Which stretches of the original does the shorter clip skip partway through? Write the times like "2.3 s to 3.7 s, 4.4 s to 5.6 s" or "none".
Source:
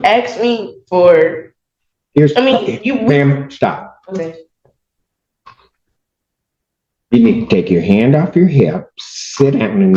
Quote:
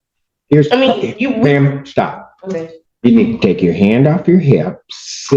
4.5 s to 6.9 s